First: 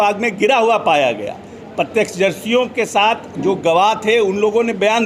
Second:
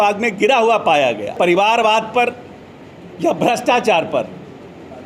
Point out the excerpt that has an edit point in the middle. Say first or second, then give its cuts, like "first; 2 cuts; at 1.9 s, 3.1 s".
second; 1 cut; at 1.3 s